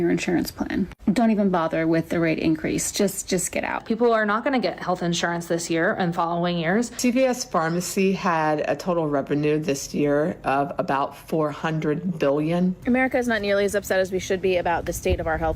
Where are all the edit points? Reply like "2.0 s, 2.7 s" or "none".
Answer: 3.8 s, 6.9 s, 12.8 s